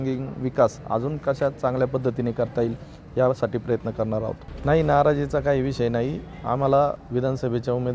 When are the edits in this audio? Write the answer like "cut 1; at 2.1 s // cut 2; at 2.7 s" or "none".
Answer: cut 1; at 4.4 s // cut 2; at 7.0 s